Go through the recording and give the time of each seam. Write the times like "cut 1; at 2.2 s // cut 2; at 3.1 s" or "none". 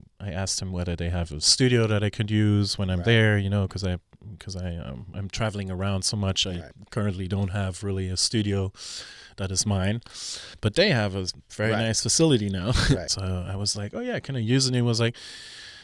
cut 1; at 10.4 s // cut 2; at 13.1 s